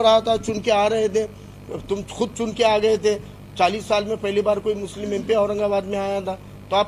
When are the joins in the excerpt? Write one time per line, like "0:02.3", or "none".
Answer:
none